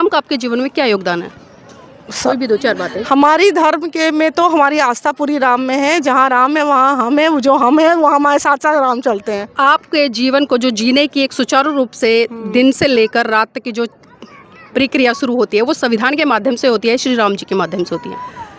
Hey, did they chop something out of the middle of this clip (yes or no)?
no